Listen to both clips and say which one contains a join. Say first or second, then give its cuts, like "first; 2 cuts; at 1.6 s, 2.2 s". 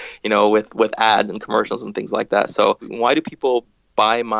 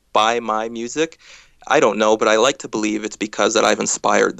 first; 1 cut; at 2.9 s